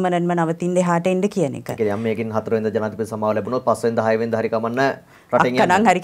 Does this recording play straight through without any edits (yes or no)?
yes